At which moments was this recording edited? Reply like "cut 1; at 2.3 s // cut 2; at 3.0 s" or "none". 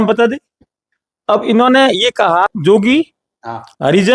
cut 1; at 2.5 s